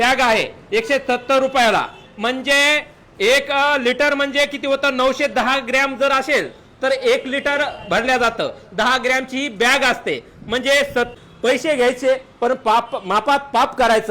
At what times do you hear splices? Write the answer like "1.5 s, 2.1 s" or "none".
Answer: 11.1 s